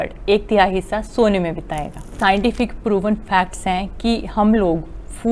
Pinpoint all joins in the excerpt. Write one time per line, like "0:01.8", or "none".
0:02.1